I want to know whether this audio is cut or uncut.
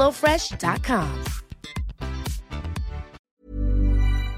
cut